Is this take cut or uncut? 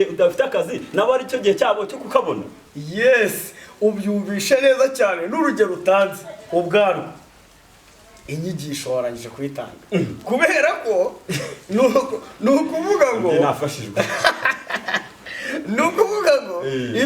uncut